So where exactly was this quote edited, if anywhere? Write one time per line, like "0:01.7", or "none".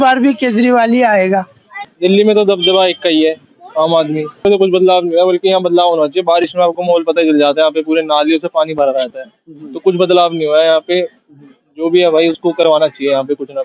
0:01.9
0:04.4